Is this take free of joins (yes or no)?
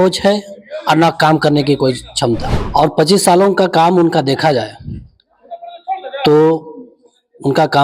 no